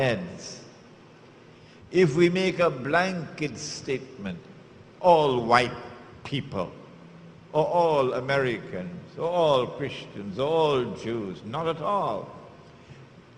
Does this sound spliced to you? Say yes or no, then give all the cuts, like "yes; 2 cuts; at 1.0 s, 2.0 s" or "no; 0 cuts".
no; 0 cuts